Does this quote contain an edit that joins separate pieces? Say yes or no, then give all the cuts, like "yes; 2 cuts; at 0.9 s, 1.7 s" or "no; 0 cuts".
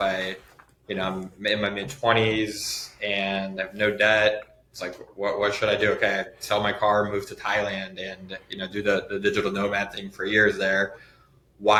no; 0 cuts